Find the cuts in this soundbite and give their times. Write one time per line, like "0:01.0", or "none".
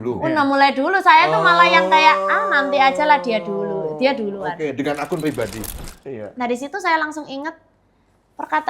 0:05.7